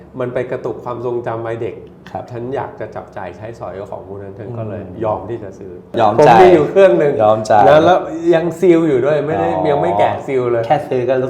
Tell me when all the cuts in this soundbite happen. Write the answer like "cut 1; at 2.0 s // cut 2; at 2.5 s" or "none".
cut 1; at 5.9 s

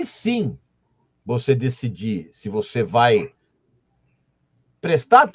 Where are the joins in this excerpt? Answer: none

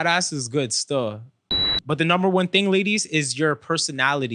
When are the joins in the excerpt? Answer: cut 1; at 1.7 s

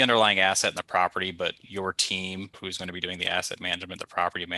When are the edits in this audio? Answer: cut 1; at 2.6 s

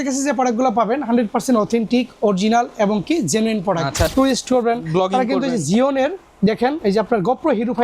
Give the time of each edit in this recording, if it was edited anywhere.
cut 1; at 4.1 s

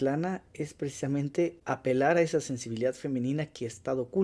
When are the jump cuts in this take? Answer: cut 1; at 1.6 s

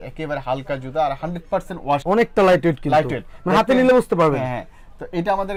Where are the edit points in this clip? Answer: none

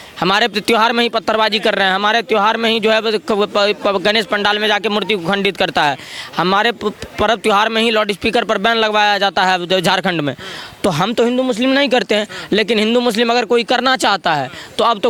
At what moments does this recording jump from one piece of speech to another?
none

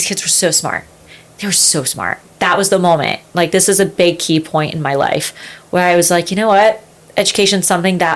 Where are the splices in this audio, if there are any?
cut 1; at 2.2 s

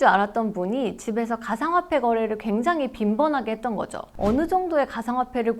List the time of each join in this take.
cut 1; at 4.1 s

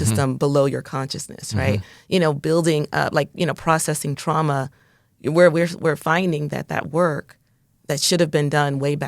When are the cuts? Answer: cut 1; at 2.0 s

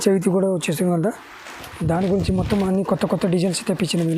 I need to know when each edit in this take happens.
none

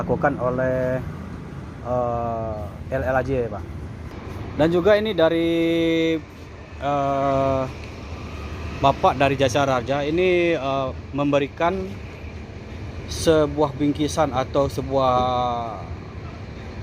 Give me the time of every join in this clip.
cut 1; at 4.1 s

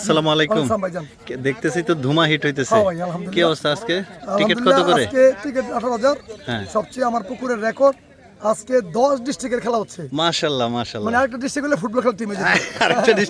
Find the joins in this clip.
none

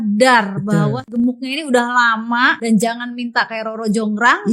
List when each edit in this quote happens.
cut 1; at 1.0 s // cut 2; at 2.6 s

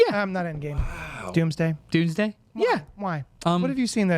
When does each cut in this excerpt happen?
cut 1; at 3.3 s

